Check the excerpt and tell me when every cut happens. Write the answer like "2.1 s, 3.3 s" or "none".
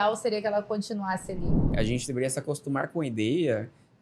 1.6 s